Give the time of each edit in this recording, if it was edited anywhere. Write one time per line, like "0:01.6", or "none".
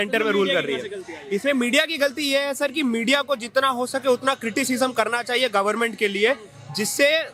none